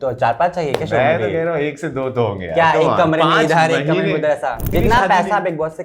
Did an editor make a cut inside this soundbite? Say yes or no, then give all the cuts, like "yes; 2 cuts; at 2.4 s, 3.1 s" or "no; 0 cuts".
yes; 1 cut; at 4.6 s